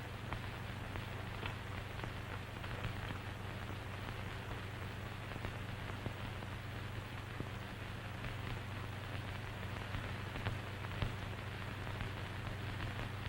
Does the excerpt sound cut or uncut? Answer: cut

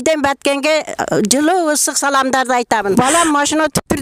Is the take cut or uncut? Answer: cut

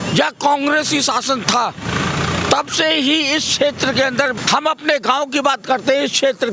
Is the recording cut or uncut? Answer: cut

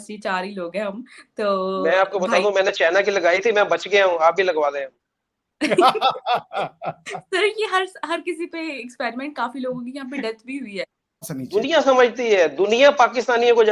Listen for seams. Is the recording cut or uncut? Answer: cut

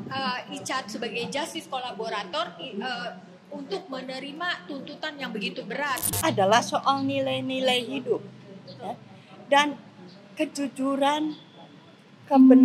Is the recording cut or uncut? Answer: cut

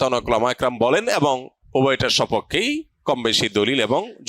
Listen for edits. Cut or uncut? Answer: cut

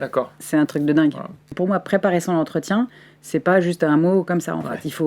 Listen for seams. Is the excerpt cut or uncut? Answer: cut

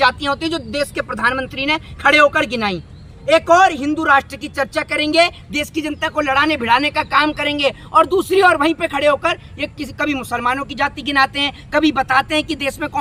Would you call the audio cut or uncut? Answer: uncut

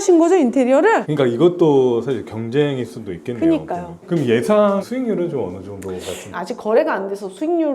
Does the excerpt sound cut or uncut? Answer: cut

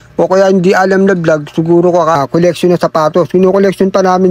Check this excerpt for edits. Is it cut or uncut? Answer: cut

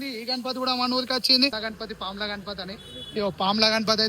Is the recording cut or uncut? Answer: cut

